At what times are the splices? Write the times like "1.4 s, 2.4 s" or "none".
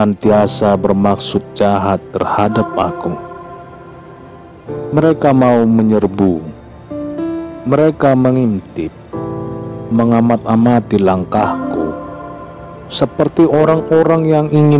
none